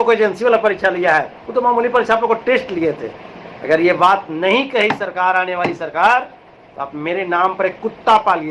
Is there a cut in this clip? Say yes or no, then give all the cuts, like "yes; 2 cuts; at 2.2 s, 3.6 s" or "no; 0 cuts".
no; 0 cuts